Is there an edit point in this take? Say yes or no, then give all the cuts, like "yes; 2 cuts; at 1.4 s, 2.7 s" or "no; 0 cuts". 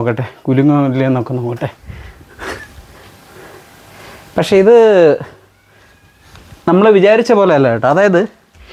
no; 0 cuts